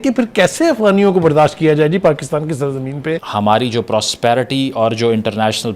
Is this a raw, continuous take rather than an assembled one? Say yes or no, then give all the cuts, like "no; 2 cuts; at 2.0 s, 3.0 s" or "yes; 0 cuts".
no; 1 cut; at 3.2 s